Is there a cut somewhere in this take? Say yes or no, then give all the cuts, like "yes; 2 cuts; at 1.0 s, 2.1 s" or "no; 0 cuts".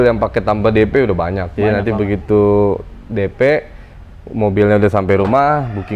no; 0 cuts